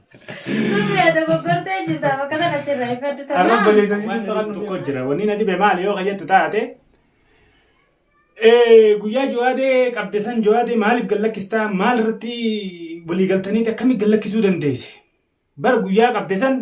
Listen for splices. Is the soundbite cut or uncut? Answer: cut